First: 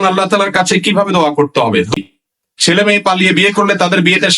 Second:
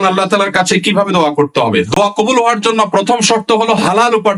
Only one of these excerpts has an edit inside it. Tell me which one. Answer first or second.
first